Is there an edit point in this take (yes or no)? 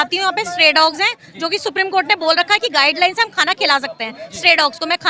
no